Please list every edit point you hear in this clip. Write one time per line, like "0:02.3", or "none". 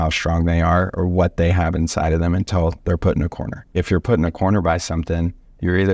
0:03.7